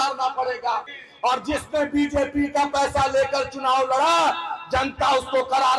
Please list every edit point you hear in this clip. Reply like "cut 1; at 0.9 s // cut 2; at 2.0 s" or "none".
cut 1; at 1.0 s